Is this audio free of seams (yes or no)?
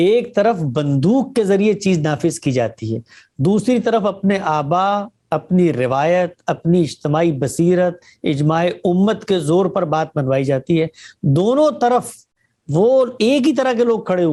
yes